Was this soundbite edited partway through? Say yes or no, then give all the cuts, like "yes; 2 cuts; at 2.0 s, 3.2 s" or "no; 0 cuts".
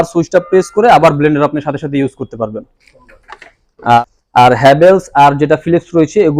yes; 1 cut; at 4.0 s